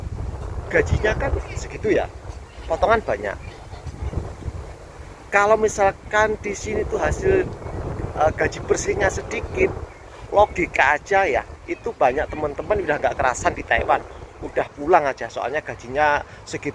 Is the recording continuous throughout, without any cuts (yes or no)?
yes